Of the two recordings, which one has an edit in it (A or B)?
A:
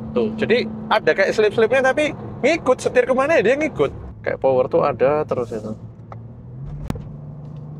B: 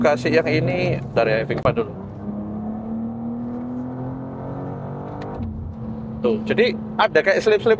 A